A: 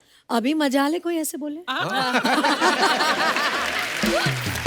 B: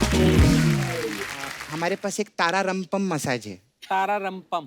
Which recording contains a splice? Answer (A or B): B